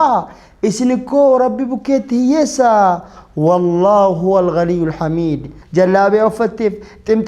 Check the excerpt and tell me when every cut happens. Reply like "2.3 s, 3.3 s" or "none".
5.5 s